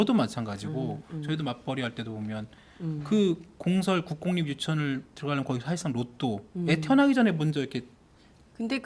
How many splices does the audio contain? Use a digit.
1